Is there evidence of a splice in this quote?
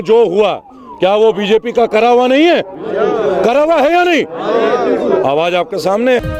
no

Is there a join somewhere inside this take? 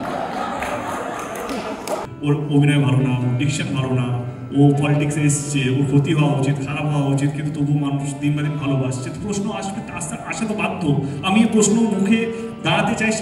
yes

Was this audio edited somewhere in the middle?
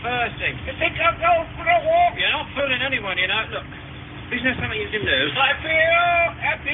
yes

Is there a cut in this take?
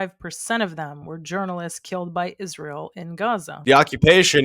yes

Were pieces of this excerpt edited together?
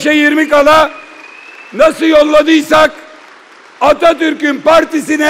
no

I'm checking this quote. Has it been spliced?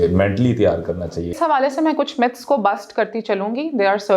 yes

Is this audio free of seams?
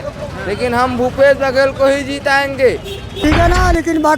no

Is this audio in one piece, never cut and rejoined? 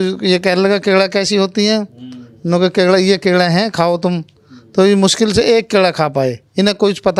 yes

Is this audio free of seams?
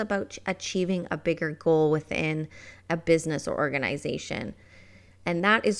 yes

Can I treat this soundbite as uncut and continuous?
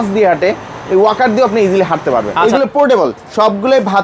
no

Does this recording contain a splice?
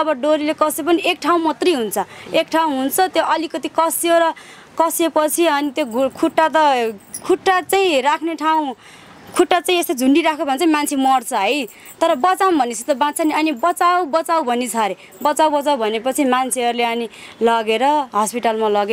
no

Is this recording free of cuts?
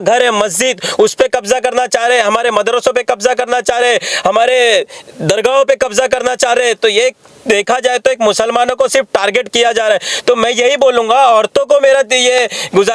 yes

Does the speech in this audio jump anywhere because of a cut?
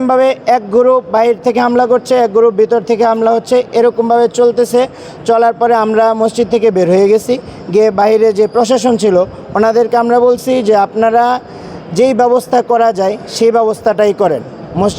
no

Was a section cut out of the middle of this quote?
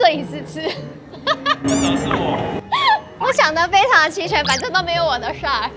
no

